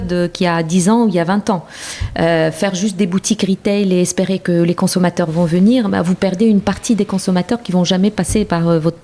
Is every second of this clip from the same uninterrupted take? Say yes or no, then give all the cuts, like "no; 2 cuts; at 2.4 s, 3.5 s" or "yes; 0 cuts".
yes; 0 cuts